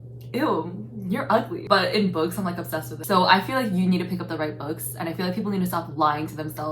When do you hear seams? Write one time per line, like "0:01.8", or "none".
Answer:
0:01.6
0:03.0